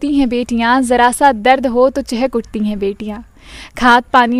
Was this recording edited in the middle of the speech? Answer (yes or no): no